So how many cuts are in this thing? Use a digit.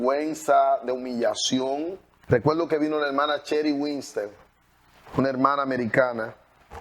1